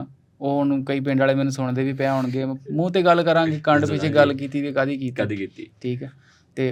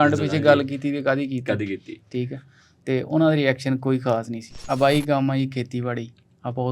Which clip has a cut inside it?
second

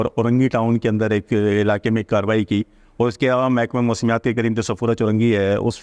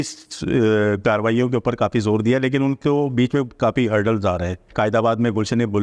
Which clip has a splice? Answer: second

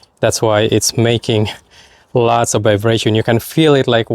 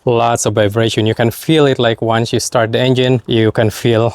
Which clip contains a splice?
second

